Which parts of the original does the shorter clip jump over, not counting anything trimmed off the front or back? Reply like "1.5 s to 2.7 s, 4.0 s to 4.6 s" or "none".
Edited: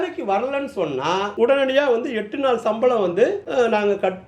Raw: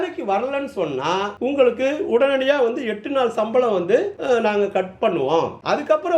1.3 s to 2.1 s